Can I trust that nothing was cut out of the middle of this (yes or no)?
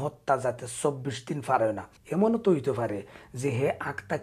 no